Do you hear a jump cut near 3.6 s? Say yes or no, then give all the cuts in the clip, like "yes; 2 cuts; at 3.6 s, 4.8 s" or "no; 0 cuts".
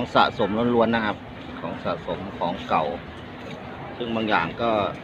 no; 0 cuts